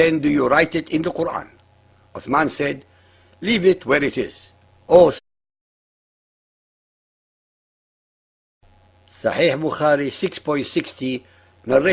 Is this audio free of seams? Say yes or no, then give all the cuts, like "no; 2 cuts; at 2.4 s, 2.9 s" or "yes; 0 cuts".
yes; 0 cuts